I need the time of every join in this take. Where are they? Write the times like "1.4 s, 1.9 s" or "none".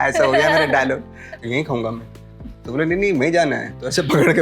1.4 s